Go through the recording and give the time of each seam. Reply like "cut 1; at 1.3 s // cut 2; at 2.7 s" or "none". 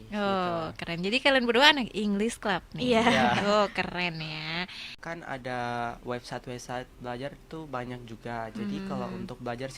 cut 1; at 4.9 s